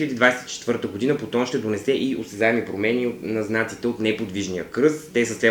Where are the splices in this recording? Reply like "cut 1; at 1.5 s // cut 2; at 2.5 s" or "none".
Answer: none

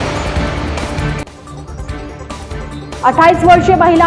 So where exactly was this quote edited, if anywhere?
cut 1; at 2.1 s

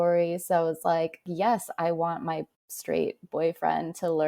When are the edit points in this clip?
cut 1; at 1.3 s

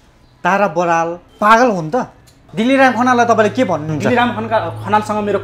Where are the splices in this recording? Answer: cut 1; at 1.2 s // cut 2; at 2.5 s

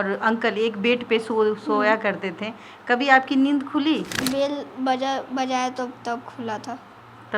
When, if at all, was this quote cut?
cut 1; at 4.2 s

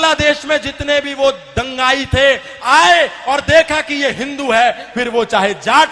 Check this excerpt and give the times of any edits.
none

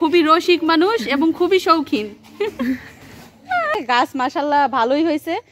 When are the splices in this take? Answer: cut 1; at 3.7 s

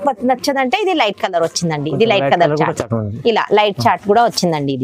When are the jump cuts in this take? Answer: none

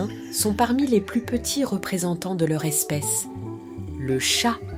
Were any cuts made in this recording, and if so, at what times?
none

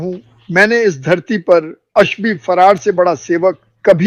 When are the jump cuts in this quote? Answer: none

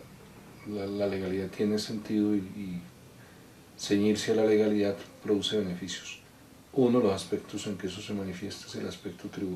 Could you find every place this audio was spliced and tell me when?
cut 1; at 4.7 s

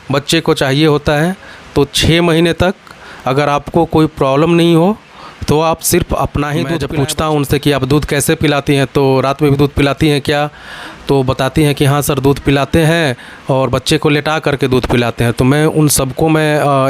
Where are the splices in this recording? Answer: cut 1; at 6.8 s

